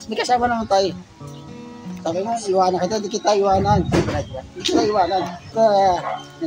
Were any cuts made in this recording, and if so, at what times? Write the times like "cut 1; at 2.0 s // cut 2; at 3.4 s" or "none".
cut 1; at 5.4 s